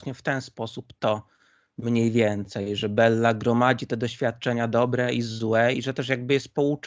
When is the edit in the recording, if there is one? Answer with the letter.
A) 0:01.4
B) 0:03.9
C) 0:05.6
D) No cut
D